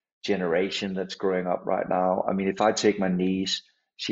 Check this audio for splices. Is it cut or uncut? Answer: uncut